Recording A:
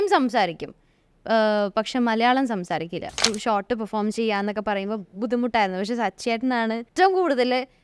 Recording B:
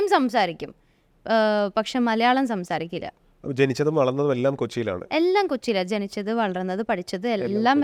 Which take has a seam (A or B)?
A